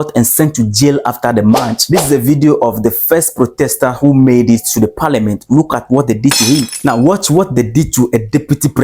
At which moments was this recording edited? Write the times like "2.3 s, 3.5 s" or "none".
1.7 s, 6.7 s